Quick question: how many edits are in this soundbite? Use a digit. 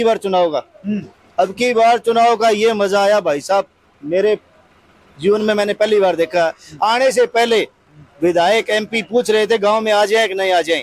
0